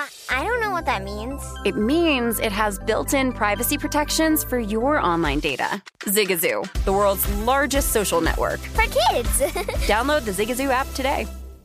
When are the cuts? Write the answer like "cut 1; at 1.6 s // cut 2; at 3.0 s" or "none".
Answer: none

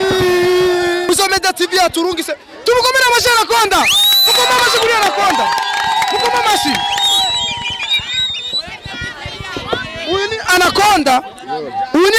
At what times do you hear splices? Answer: cut 1; at 1.1 s

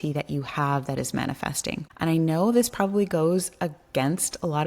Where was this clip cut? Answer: cut 1; at 1.9 s

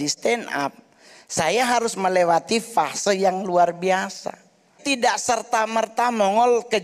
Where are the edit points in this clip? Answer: cut 1; at 4.8 s

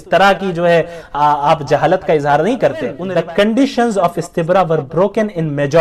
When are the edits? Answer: cut 1; at 3.0 s

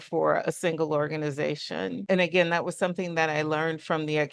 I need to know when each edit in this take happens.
cut 1; at 2.0 s

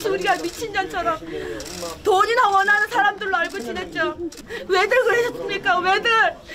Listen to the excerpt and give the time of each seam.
cut 1; at 4.5 s

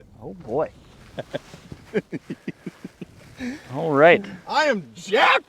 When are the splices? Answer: cut 1; at 4.4 s

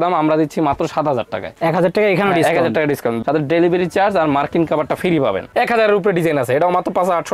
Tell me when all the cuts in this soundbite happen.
cut 1; at 3.2 s // cut 2; at 5.5 s

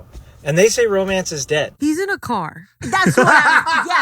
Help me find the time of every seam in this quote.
cut 1; at 1.7 s

